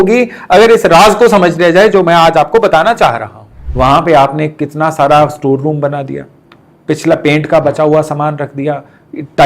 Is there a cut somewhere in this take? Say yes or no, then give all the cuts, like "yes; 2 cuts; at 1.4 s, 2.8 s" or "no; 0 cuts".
yes; 1 cut; at 3.6 s